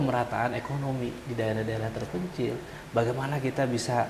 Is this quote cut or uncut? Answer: uncut